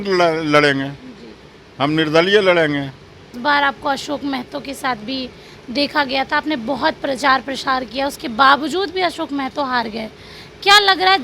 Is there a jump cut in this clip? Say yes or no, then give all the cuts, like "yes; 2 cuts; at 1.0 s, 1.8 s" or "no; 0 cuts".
yes; 1 cut; at 3.3 s